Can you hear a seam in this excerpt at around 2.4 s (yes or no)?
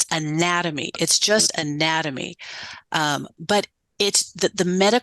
no